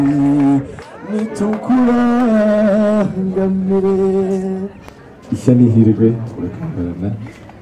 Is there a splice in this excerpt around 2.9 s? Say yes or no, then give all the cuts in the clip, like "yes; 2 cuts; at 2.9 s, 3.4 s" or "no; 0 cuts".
no; 1 cut; at 4.8 s